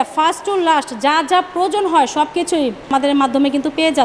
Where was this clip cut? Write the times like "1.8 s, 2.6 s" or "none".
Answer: 2.9 s